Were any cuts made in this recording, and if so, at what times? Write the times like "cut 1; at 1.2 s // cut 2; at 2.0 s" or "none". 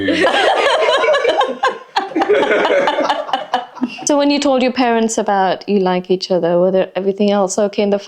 cut 1; at 4.0 s